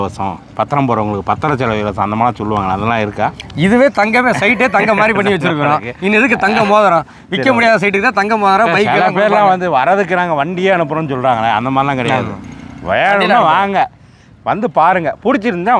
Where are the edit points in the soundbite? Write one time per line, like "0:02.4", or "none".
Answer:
none